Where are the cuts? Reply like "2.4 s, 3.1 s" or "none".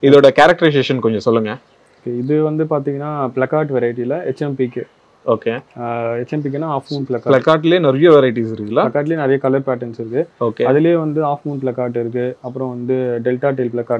none